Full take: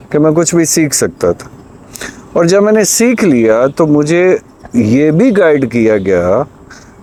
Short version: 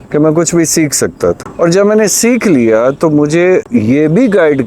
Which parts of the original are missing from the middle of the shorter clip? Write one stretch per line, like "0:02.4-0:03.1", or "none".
0:01.5-0:02.2
0:04.4-0:04.7